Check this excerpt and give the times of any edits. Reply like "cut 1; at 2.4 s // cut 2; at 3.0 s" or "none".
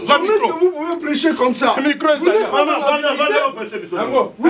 none